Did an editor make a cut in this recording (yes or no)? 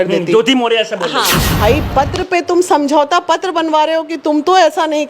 yes